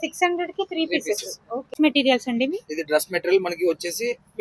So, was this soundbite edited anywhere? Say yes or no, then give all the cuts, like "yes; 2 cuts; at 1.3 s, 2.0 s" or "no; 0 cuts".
yes; 1 cut; at 1.7 s